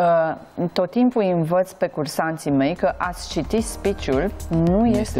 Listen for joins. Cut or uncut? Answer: uncut